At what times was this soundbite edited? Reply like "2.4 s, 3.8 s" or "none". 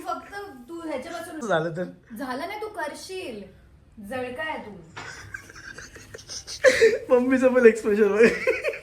1.4 s, 6.3 s